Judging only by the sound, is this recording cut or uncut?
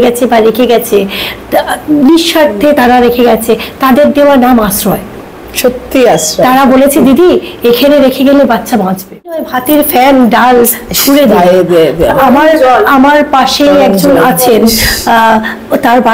cut